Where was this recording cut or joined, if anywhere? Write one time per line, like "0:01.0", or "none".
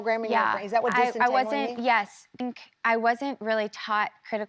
0:02.5